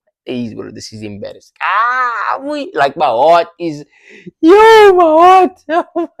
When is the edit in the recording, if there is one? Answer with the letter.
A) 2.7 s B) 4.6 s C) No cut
C